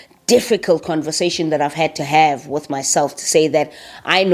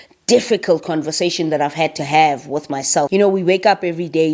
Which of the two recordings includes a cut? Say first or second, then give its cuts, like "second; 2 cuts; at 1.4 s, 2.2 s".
second; 1 cut; at 3.1 s